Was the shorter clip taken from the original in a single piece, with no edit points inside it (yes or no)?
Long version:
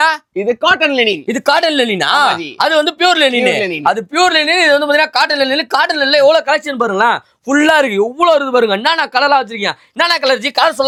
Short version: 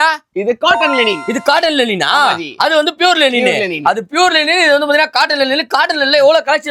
yes